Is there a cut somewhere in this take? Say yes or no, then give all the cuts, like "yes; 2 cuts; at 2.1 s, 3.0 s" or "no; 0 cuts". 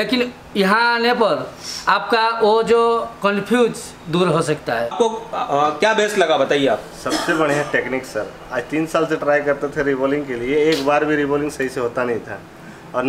yes; 1 cut; at 4.9 s